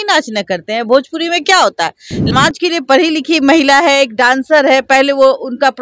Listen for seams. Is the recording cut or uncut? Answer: cut